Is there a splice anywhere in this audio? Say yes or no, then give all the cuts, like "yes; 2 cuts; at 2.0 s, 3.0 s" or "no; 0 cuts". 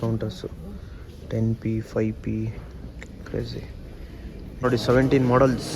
yes; 1 cut; at 4.4 s